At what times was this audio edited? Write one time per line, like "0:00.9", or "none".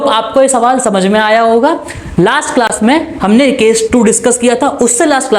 none